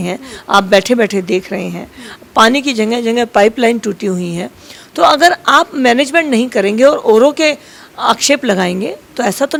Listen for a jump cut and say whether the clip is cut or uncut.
uncut